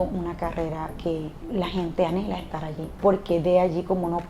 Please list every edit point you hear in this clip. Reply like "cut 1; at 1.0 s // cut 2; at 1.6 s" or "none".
cut 1; at 1.4 s // cut 2; at 3.0 s